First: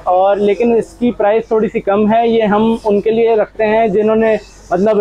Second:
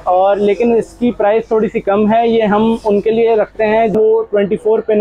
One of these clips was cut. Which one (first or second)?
second